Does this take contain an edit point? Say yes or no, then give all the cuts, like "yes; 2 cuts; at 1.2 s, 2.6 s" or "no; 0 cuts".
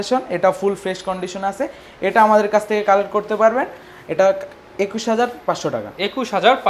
no; 0 cuts